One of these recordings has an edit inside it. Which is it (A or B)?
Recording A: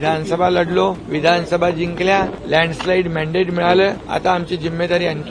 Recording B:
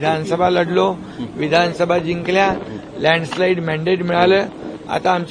A